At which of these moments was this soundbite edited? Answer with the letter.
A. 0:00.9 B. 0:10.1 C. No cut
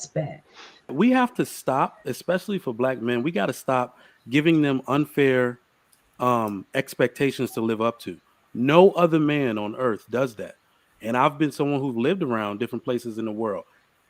A